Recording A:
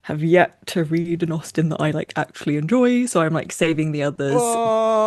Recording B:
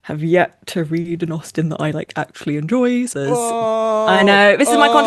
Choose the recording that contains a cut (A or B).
B